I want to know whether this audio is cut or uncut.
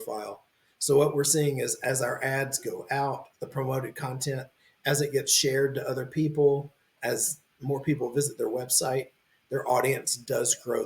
uncut